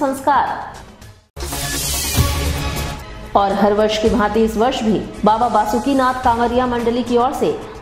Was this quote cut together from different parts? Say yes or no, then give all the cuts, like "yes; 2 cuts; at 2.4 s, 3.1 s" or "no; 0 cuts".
no; 0 cuts